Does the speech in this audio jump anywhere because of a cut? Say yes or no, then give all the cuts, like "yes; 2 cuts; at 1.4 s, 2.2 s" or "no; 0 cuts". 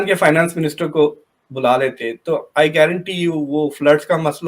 no; 0 cuts